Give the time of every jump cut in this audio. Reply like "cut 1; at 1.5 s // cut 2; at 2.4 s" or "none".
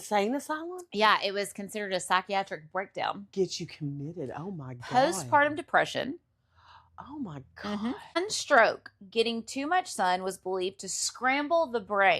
cut 1; at 8.2 s